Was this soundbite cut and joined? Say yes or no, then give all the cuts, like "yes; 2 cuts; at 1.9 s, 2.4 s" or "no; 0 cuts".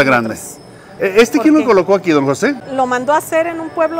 yes; 2 cuts; at 0.9 s, 2.6 s